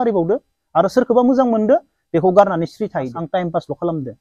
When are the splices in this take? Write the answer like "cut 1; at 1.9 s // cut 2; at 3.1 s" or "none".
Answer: cut 1; at 3.2 s